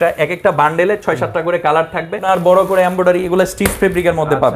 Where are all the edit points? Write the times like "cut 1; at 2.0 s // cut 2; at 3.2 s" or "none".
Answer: cut 1; at 2.2 s